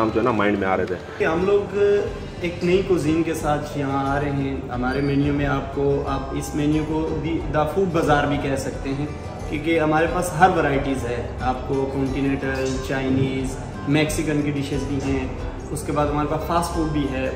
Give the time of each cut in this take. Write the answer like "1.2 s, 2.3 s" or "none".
1.1 s